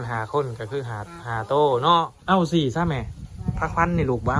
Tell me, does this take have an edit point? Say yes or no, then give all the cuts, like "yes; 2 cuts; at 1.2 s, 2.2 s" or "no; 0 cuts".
yes; 1 cut; at 2.2 s